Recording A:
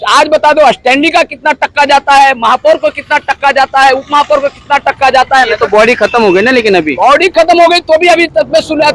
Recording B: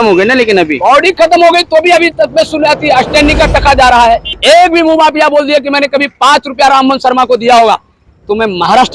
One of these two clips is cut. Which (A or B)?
B